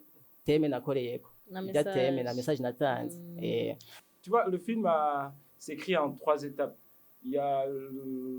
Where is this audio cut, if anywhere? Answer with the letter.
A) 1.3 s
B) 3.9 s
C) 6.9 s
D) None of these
B